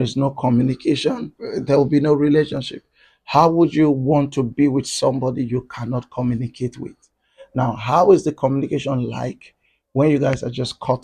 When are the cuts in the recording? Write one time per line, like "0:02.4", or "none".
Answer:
0:01.3